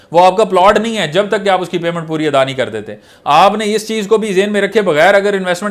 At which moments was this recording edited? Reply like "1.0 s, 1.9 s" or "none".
none